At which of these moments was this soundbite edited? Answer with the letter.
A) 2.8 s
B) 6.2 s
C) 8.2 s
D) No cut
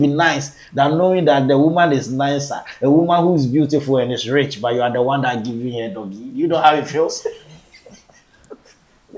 D